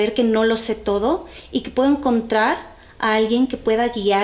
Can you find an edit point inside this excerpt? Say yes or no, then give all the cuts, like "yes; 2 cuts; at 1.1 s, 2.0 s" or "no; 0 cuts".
no; 0 cuts